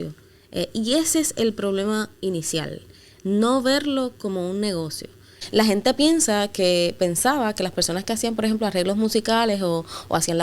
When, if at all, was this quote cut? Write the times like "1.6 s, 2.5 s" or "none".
5.3 s